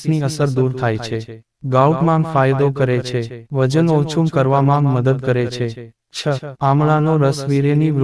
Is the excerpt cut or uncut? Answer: cut